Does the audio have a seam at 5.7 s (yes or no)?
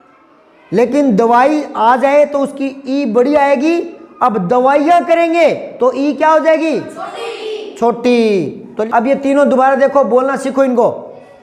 no